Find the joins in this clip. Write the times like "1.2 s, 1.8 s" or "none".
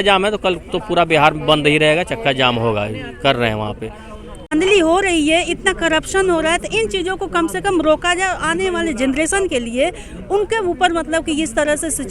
4.5 s